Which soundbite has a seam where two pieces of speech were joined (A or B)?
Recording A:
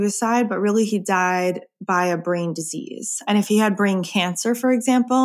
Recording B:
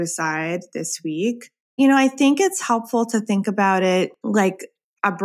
B